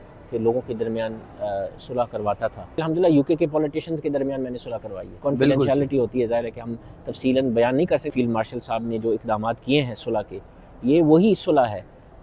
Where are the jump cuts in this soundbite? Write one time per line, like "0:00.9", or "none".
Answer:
0:02.8
0:05.1
0:08.1